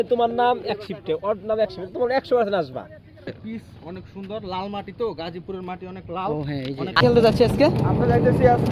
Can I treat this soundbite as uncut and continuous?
no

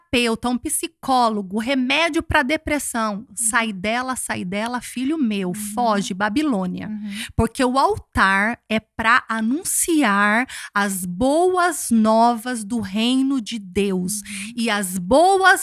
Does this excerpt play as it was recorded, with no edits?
yes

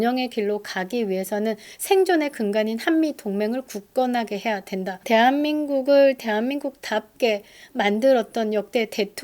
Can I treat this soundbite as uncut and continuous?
no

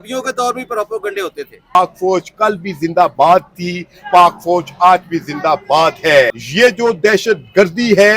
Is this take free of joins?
no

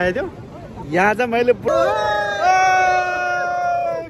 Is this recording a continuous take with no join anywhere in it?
no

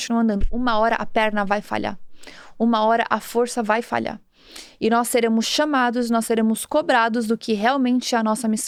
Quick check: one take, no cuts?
yes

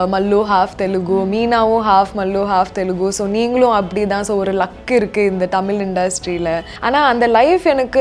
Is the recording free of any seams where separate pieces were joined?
no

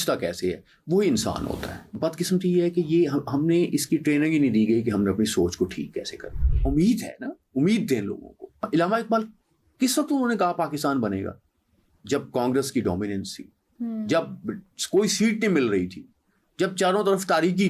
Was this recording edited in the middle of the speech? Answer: yes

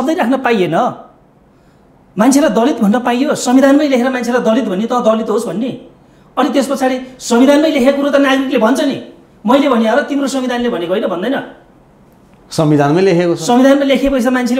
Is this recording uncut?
yes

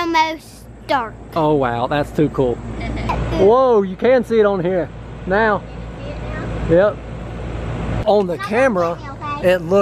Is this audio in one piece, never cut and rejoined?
yes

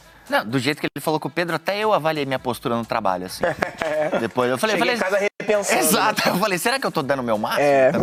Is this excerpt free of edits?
yes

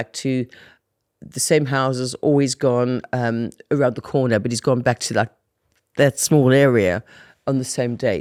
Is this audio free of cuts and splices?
yes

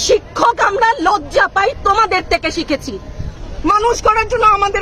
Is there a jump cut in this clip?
yes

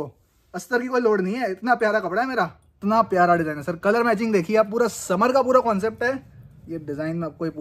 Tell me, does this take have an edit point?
yes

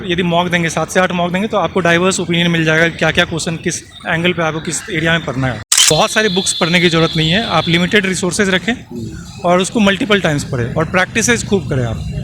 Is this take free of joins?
no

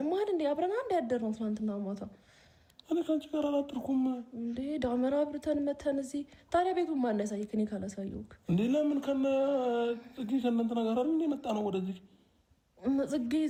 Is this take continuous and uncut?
yes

